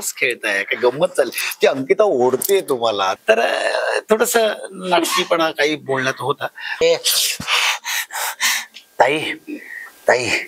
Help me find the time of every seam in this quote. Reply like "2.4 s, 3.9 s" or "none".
3.2 s, 6.8 s